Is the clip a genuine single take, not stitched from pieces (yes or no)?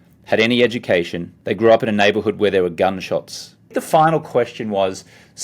no